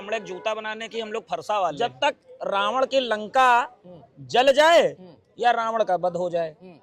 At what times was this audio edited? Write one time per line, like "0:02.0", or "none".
0:01.8